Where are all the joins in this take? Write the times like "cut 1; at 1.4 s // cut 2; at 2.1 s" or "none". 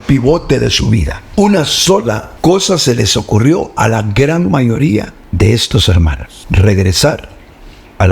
cut 1; at 1.2 s // cut 2; at 2.3 s // cut 3; at 5.2 s // cut 4; at 6.3 s